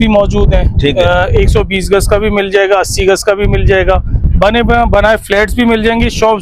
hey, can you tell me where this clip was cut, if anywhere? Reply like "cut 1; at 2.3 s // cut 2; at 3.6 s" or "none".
none